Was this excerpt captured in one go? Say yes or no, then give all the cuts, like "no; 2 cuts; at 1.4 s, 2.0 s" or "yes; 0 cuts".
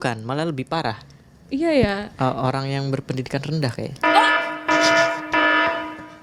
yes; 0 cuts